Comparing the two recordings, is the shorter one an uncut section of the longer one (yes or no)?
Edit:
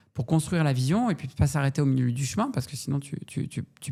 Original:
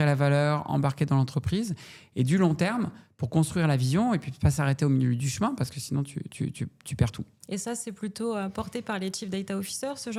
yes